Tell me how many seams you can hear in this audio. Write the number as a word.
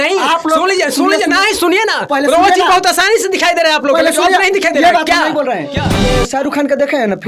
one